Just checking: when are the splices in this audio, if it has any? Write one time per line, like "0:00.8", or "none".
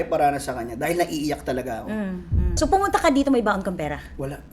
0:02.4